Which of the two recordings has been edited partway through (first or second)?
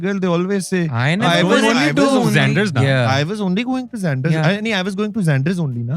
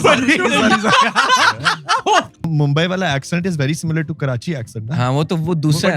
second